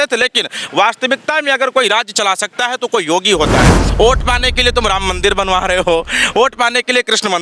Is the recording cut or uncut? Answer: cut